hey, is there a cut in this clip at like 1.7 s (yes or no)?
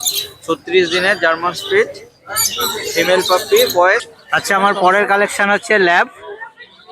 no